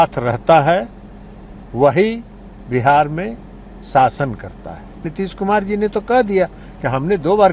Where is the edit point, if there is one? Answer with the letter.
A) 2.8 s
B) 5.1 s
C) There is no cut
B